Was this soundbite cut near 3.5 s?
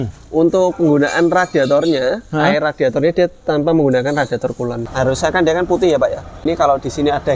no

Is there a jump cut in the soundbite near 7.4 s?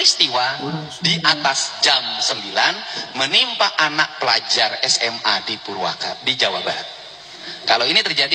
no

